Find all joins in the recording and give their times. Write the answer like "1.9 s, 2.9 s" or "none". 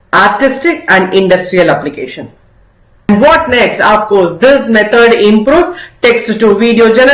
3.1 s